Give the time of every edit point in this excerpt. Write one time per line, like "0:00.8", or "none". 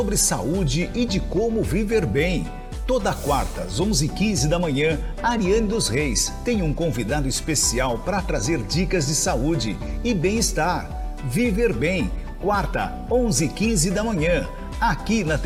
none

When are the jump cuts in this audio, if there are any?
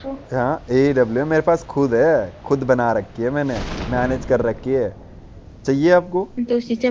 0:06.0

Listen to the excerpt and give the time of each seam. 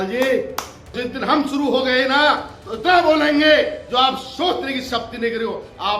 0:01.0

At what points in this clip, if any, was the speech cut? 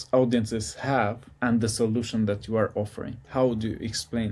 0:03.1

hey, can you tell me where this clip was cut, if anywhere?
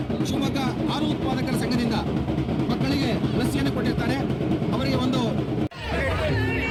none

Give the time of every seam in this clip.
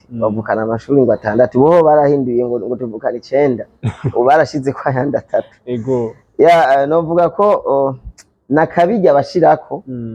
none

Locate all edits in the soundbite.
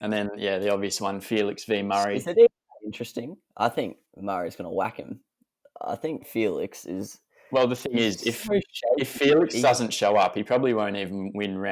0:02.2

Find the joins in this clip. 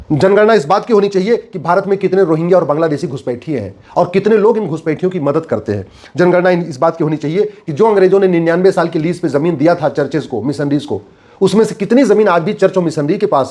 none

